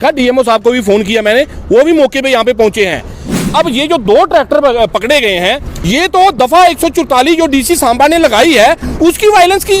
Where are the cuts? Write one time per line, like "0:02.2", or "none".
0:03.3
0:05.7

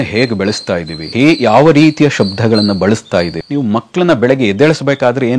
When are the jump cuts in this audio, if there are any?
0:01.0
0:03.4

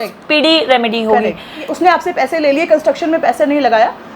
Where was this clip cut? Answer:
0:01.6

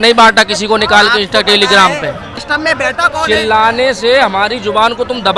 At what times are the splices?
0:02.3

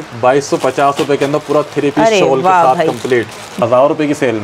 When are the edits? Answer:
0:03.5

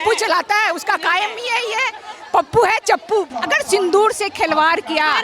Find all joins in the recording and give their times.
0:03.3

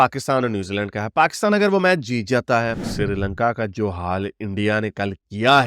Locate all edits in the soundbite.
0:02.8

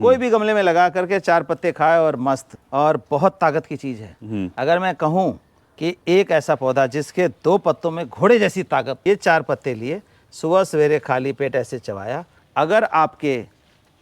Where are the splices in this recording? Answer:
0:02.6
0:09.0
0:12.3

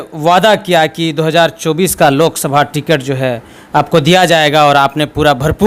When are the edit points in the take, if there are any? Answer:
none

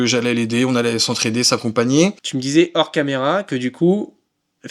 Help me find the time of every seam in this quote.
0:02.3

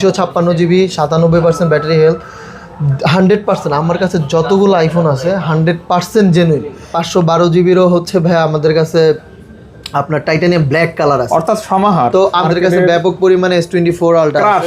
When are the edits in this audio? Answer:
0:07.0
0:12.4

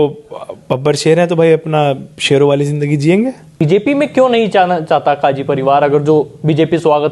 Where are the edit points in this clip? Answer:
0:03.6

